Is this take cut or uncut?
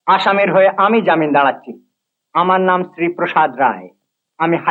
uncut